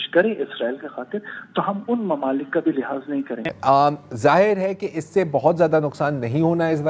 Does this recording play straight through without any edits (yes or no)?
yes